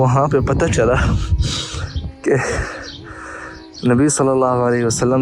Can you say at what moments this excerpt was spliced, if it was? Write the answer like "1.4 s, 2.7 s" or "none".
none

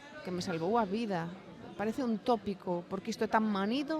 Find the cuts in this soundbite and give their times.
none

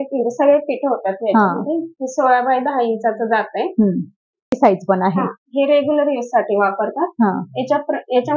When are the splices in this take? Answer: 4.6 s

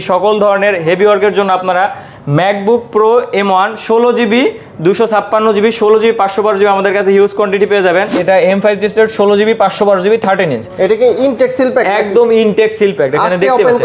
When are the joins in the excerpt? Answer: 8.2 s

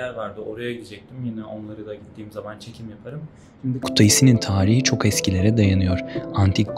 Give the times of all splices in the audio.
3.9 s

